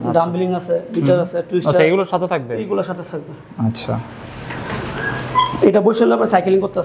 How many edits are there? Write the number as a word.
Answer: zero